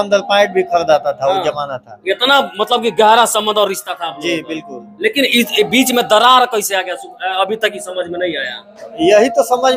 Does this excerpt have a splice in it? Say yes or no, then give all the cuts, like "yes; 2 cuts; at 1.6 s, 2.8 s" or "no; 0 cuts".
no; 0 cuts